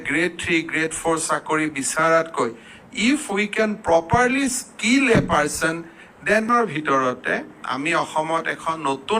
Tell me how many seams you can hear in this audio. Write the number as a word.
one